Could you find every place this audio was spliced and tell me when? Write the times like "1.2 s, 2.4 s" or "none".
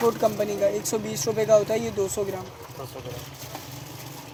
none